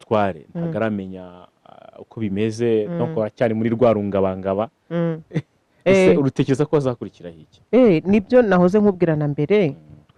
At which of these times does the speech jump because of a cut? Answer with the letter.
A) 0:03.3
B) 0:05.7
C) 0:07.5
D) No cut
D